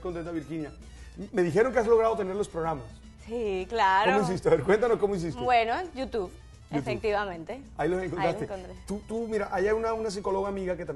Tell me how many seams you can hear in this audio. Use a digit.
1